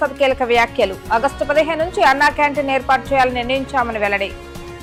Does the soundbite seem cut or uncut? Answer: uncut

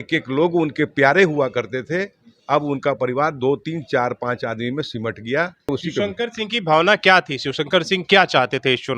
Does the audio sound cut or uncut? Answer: cut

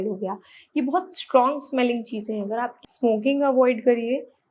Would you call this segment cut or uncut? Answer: cut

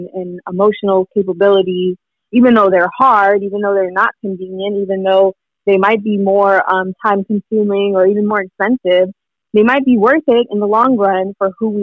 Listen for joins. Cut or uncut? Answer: uncut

